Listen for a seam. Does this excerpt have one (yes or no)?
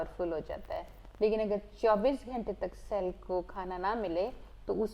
no